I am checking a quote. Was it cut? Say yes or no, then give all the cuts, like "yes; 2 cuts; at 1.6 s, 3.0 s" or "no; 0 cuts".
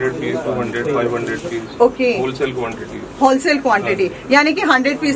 no; 0 cuts